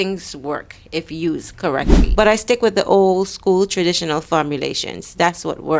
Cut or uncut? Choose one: cut